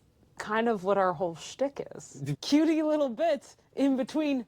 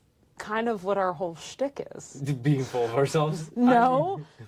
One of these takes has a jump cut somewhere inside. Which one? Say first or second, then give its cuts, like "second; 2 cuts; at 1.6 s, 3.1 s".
first; 1 cut; at 2.3 s